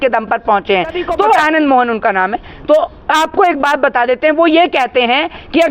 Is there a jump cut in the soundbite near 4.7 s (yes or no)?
no